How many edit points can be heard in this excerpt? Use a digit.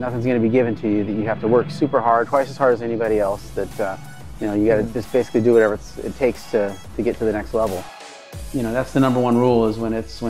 1